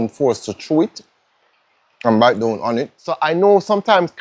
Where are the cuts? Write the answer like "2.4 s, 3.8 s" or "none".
3.2 s